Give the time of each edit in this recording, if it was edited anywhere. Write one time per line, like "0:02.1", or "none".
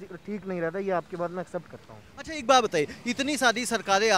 none